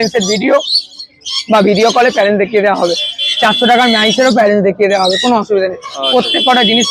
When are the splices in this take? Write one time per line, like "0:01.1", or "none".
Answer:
none